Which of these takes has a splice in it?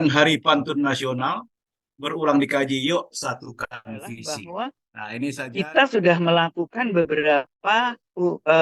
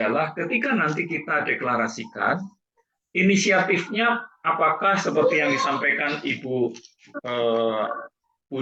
first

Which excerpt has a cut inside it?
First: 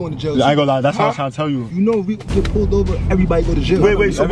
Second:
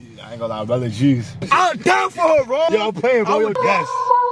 second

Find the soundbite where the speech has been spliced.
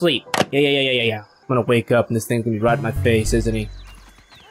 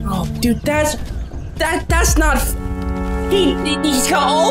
first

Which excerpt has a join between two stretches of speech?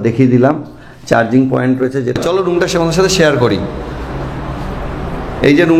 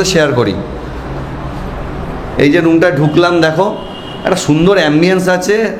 first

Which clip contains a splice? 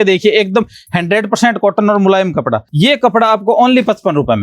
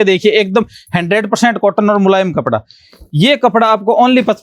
first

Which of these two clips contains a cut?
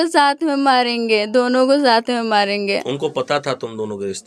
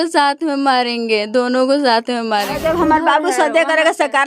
second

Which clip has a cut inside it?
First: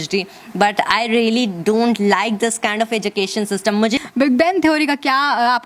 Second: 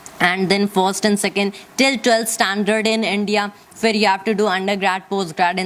first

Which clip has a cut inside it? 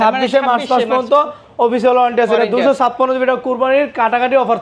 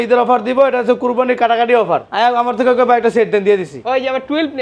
second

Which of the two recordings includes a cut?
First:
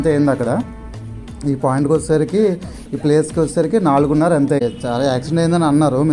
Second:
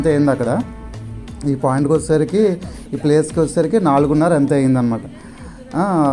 first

